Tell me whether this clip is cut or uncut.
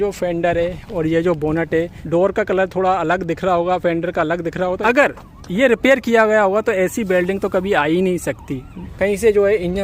cut